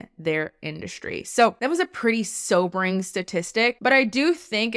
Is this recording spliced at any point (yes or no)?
yes